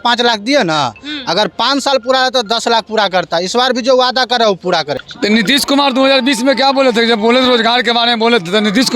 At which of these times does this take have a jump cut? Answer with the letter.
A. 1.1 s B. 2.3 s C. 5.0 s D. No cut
C